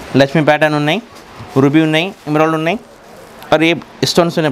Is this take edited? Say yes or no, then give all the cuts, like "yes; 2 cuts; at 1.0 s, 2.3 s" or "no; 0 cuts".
no; 0 cuts